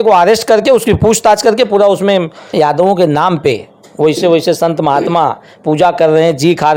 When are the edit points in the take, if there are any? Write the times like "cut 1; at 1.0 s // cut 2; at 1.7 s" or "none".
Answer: cut 1; at 2.5 s